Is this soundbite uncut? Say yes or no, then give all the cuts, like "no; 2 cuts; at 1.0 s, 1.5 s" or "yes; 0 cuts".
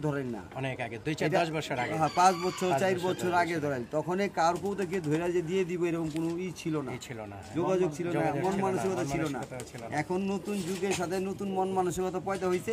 yes; 0 cuts